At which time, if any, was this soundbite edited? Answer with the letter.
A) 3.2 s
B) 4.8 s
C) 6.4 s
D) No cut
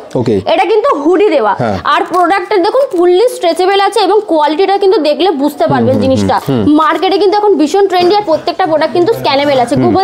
C